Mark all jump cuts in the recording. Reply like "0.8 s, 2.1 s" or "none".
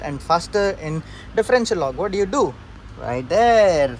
none